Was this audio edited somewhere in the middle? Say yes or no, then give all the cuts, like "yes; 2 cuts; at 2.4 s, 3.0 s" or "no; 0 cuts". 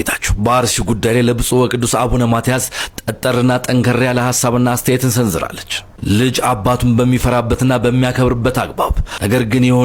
no; 0 cuts